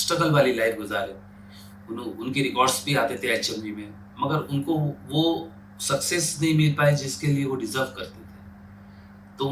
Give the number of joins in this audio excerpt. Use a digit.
0